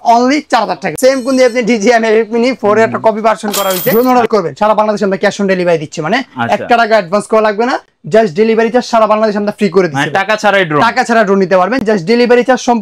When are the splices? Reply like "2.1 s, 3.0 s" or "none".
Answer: 0.9 s, 3.9 s